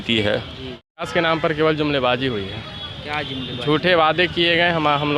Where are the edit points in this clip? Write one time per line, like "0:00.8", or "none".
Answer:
0:01.0